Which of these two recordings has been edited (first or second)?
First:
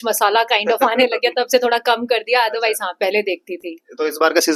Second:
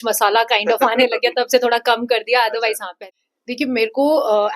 second